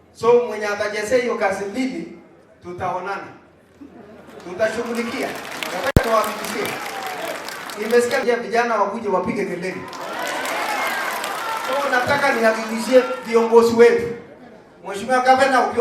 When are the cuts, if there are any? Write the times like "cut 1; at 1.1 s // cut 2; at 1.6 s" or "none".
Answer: cut 1; at 8.2 s